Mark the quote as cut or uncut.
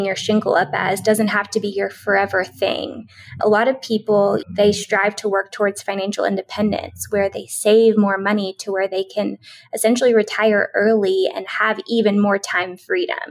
cut